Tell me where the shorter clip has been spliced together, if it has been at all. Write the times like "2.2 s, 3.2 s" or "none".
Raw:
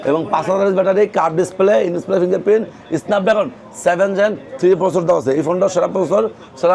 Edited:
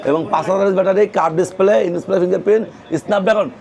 none